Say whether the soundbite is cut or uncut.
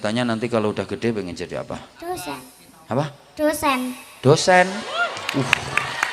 uncut